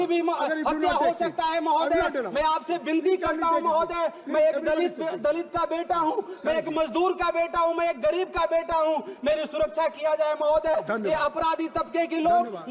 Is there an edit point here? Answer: no; 0 cuts

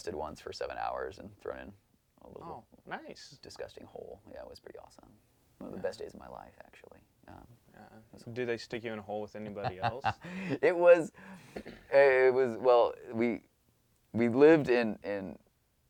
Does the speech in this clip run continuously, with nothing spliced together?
yes; 0 cuts

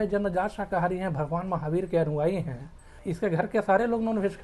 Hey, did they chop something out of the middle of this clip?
yes; 1 cut; at 3.0 s

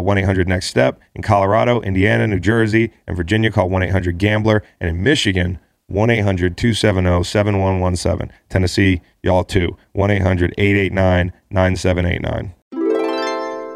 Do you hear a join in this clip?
yes; 1 cut; at 12.6 s

